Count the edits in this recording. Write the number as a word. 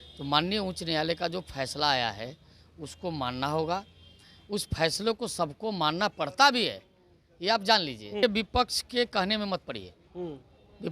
one